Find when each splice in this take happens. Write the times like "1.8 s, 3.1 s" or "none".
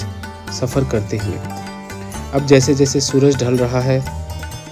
none